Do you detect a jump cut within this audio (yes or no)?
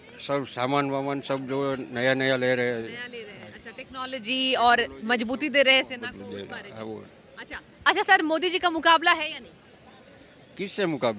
no